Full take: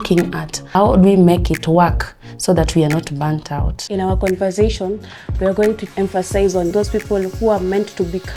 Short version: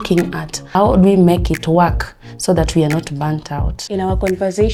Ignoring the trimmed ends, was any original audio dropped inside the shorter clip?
no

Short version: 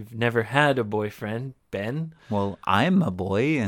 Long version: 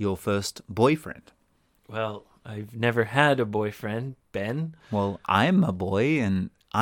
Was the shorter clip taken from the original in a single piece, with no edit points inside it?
yes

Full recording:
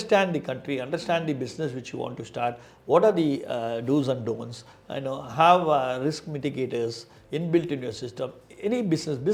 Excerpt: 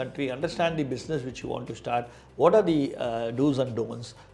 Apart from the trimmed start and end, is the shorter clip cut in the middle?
no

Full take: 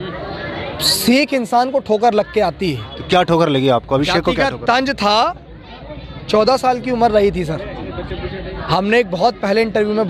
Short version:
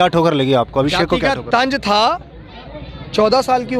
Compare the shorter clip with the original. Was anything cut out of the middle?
no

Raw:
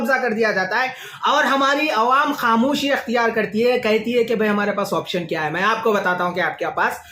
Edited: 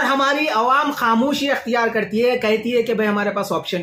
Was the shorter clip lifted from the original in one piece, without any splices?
yes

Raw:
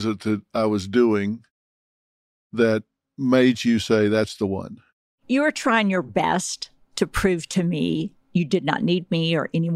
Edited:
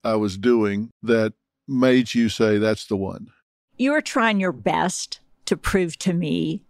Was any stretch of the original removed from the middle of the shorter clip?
yes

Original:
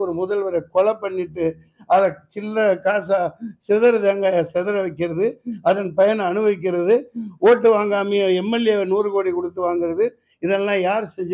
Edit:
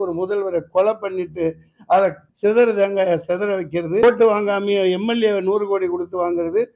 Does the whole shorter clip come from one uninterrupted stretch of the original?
no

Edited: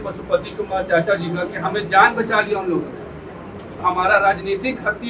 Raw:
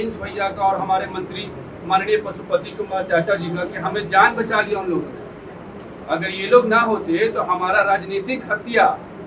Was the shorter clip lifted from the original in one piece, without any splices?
no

